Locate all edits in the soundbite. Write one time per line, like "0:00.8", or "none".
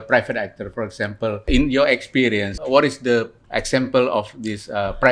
0:01.4
0:02.5
0:03.4